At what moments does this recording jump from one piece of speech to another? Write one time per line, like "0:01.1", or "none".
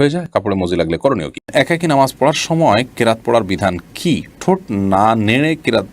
0:01.4